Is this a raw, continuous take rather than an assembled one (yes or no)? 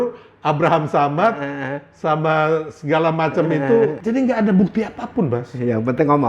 no